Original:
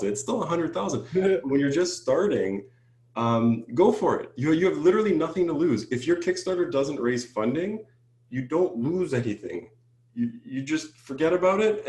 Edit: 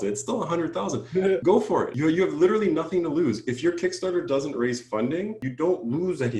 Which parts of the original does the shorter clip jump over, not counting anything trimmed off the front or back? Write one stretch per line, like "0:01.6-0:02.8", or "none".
0:01.6-0:04.1
0:07.8-0:08.3